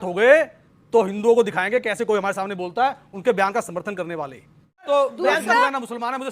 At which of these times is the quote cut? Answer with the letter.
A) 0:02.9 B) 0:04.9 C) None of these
B